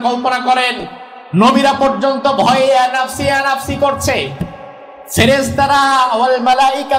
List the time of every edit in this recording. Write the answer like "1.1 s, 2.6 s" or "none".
1.3 s